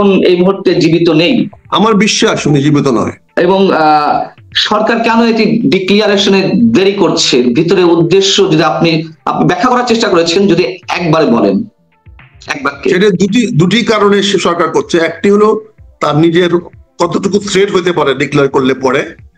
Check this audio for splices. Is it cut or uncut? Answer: cut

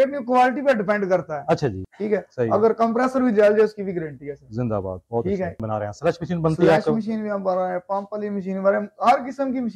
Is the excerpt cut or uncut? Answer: cut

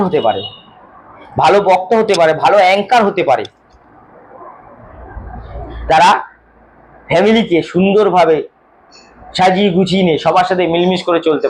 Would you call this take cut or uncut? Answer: uncut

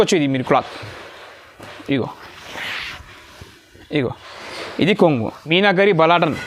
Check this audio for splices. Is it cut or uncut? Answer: cut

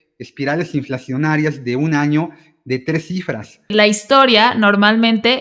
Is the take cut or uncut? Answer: cut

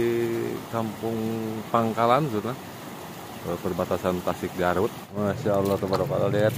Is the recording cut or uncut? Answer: cut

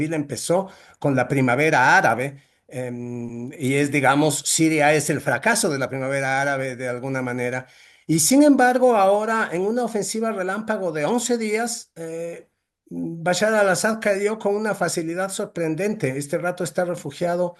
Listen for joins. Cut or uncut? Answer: uncut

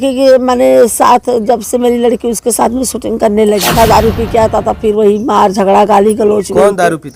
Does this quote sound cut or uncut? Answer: cut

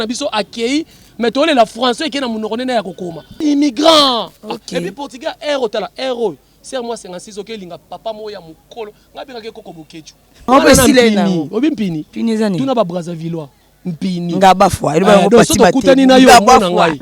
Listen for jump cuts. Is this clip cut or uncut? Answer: cut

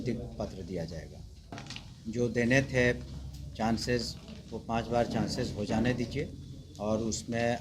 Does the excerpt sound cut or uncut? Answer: cut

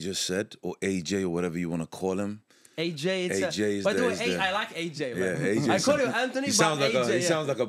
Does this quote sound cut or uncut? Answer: uncut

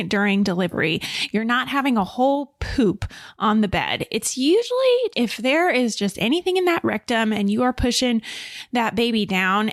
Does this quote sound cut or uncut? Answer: uncut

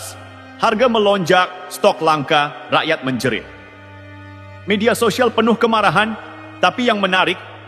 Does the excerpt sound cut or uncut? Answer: uncut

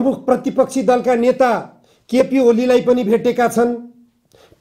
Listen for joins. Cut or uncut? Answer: uncut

